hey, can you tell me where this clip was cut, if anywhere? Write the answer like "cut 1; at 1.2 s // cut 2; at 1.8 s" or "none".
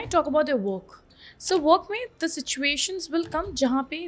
none